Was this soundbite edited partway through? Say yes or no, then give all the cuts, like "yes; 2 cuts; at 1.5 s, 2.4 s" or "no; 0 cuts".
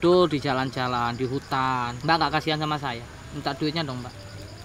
yes; 1 cut; at 2.0 s